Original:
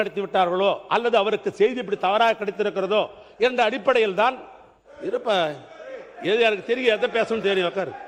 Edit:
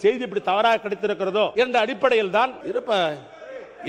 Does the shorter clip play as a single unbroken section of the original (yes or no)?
no